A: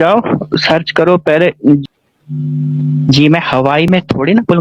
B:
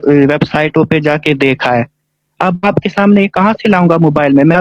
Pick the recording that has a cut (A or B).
A